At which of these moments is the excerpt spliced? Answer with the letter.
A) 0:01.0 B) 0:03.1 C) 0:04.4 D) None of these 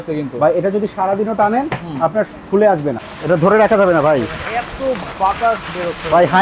B